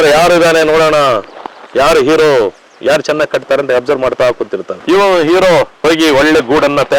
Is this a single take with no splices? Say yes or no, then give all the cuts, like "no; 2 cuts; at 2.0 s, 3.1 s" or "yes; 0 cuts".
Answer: yes; 0 cuts